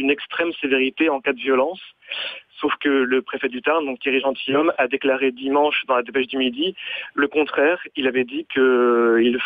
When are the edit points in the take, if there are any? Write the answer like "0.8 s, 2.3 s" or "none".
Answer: none